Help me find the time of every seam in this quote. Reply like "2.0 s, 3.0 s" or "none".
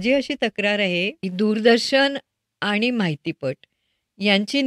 1.2 s